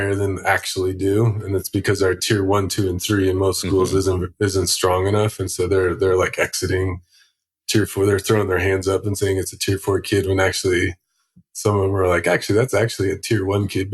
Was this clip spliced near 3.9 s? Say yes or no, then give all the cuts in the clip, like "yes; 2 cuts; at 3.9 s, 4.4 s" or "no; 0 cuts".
no; 0 cuts